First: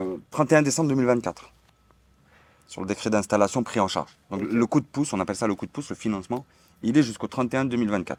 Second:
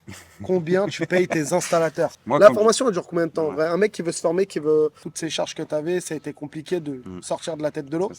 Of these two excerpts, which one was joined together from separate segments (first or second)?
second